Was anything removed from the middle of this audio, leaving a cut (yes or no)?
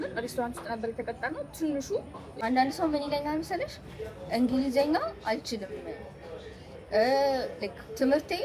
yes